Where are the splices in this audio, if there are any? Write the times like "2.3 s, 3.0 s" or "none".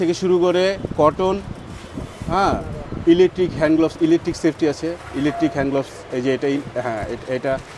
none